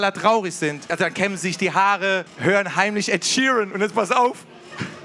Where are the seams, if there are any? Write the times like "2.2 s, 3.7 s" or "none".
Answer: 0.9 s, 2.3 s